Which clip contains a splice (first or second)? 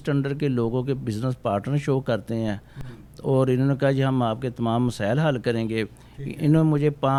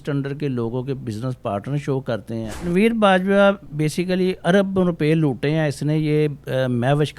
second